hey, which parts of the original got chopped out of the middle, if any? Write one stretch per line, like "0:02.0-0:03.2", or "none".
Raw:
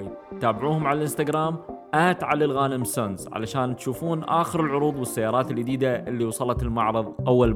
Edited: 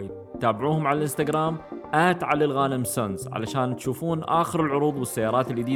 none